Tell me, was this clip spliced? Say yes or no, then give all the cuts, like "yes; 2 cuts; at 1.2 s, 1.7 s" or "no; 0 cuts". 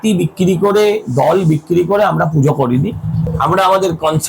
yes; 1 cut; at 3.3 s